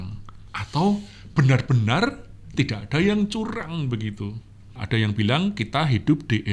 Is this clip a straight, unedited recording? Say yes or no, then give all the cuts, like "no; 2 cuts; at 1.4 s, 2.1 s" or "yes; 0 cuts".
yes; 0 cuts